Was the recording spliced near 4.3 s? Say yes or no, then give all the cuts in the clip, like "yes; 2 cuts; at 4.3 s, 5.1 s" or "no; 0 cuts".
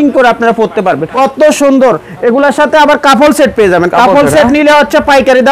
no; 1 cut; at 1.1 s